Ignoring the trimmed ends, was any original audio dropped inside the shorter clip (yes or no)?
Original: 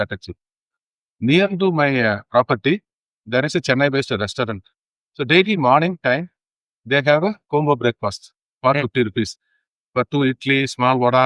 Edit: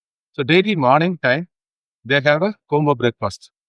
no